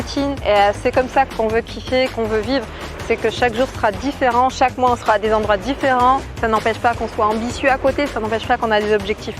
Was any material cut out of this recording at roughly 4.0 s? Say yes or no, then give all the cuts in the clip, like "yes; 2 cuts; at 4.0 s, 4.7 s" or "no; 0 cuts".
no; 2 cuts; at 2.1 s, 6.3 s